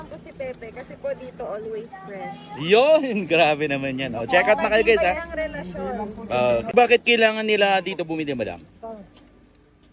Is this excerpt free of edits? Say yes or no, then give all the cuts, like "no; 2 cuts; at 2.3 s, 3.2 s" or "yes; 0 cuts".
no; 1 cut; at 6.7 s